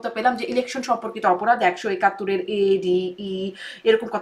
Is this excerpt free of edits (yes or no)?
yes